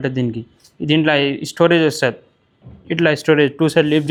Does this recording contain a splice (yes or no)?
no